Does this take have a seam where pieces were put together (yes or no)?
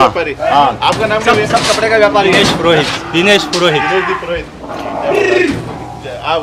no